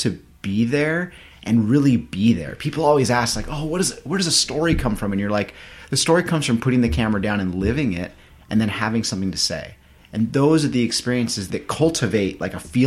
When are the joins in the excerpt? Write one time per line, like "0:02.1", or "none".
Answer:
0:11.5